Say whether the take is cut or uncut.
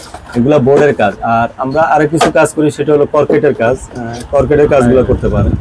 uncut